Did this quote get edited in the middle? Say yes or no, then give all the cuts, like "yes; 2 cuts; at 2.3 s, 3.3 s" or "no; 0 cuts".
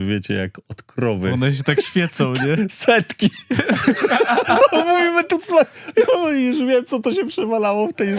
no; 0 cuts